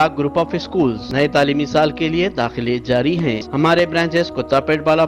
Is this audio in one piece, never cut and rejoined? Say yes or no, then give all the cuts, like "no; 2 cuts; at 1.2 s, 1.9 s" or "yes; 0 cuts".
no; 2 cuts; at 1.0 s, 3.5 s